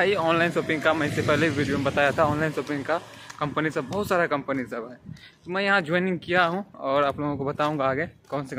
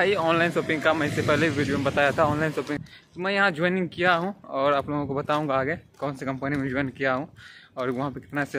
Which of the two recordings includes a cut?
second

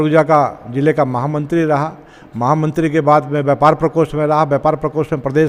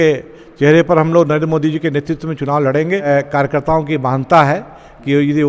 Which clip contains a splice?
second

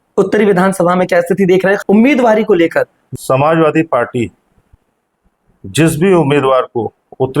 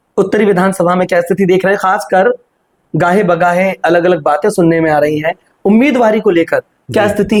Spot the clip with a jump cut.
first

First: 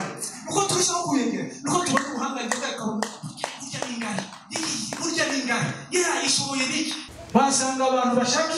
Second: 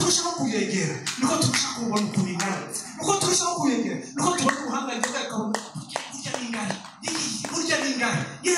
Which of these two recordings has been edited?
first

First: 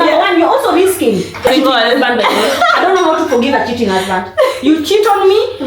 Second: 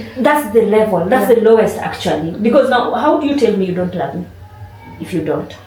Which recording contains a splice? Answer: first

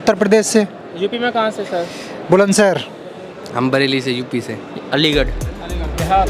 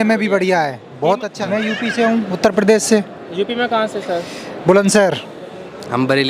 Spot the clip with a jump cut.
second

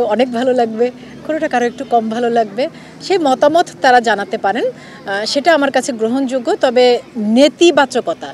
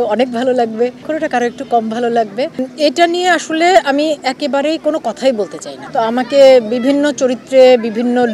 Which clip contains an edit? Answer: second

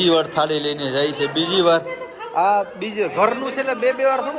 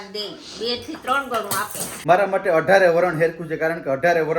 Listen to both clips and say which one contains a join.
second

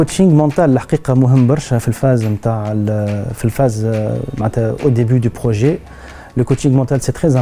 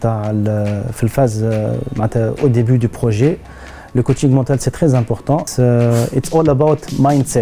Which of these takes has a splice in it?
second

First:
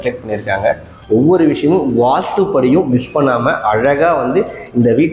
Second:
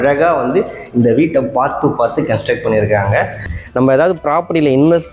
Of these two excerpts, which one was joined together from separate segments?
second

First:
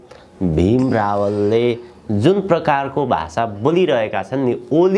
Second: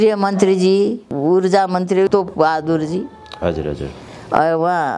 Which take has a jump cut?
second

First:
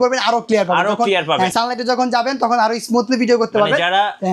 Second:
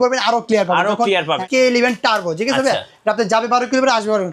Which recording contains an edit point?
second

